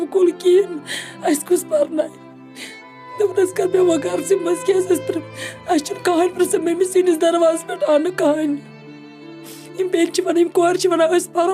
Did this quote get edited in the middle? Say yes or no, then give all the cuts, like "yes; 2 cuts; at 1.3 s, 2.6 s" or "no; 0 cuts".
no; 0 cuts